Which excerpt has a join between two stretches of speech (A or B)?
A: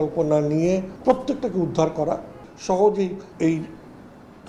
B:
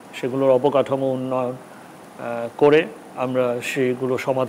A